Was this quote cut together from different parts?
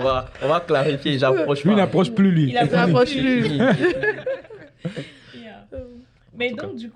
no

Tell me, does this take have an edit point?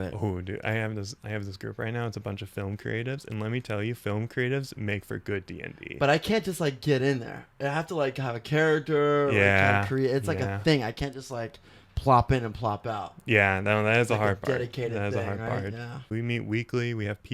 yes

